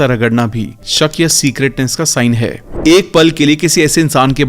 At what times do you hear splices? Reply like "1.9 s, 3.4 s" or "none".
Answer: 2.6 s